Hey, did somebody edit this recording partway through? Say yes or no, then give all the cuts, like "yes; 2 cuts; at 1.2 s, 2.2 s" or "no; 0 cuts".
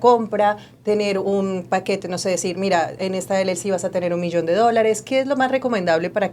no; 0 cuts